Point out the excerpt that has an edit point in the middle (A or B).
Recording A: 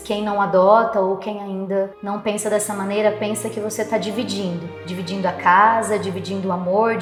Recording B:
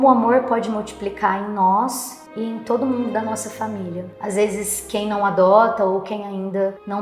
B